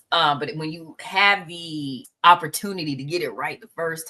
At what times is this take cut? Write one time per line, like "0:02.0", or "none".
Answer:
0:02.0

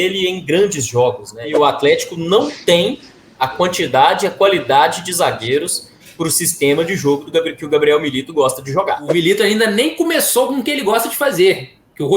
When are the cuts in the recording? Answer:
0:01.5
0:09.1

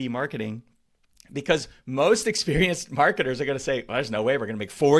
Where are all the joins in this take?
none

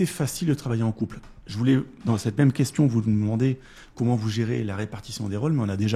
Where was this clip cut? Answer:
none

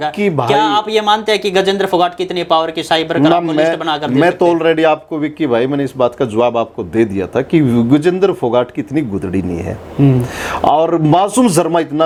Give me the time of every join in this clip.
none

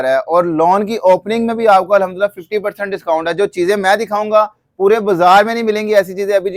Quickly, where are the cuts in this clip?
none

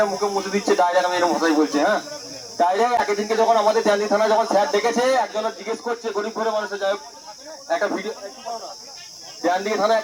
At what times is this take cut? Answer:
none

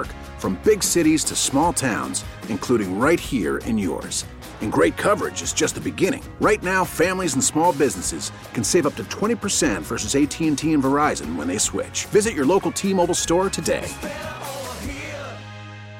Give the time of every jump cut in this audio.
none

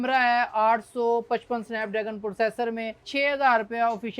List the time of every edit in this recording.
0:03.0

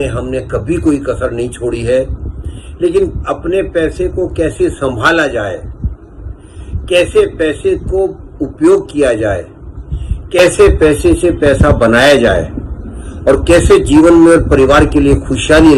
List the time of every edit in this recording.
none

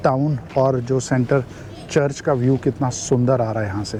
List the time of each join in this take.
none

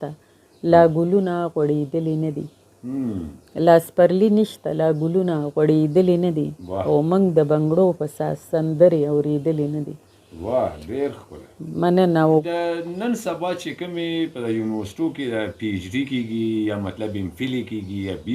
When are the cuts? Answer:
0:12.5

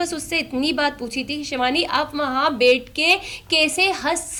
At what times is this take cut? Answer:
none

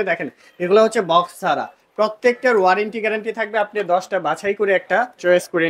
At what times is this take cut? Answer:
none

